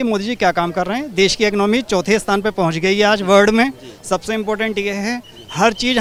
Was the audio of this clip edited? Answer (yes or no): no